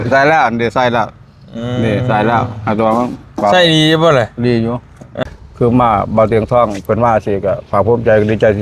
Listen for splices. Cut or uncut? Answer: cut